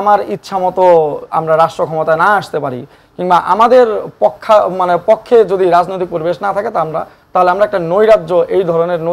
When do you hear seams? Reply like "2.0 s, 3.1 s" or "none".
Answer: none